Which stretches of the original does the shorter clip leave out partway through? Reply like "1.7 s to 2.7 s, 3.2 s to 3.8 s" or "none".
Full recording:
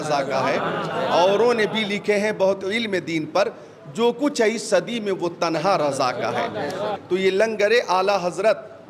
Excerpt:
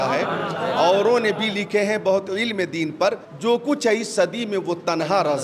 3.6 s to 3.8 s